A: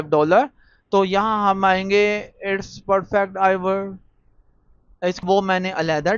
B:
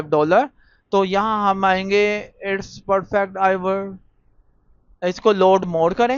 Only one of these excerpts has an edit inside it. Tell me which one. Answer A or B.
A